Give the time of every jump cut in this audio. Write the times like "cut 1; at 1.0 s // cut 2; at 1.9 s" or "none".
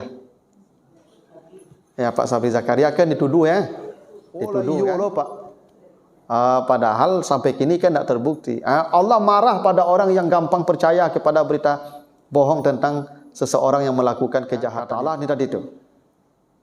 cut 1; at 4.6 s // cut 2; at 14.8 s